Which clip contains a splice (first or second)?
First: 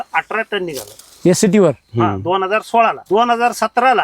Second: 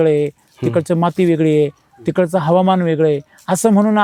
first